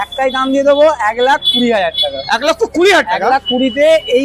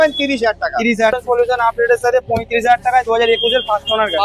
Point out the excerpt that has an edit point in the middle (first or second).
second